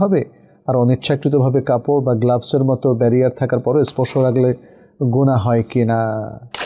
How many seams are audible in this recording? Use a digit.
0